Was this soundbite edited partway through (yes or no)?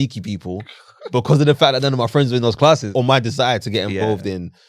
yes